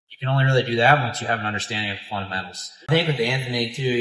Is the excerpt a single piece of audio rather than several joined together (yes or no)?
no